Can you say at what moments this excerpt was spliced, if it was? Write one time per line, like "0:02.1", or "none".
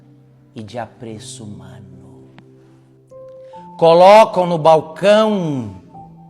0:01.8
0:03.8